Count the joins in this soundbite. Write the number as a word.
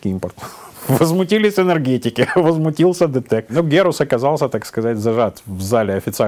one